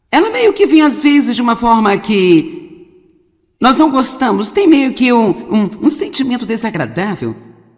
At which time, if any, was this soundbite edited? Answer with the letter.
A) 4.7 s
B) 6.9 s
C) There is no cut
C